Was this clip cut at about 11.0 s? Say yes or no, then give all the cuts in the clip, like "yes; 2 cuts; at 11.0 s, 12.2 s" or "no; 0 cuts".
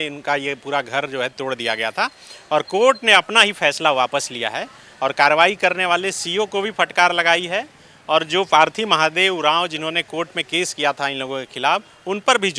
no; 0 cuts